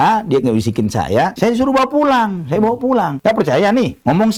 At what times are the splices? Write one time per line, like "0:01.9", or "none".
none